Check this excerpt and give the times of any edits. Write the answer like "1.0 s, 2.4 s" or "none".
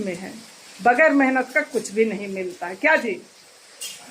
none